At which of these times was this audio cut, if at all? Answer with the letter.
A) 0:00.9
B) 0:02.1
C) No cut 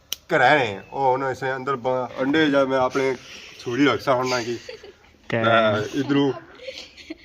B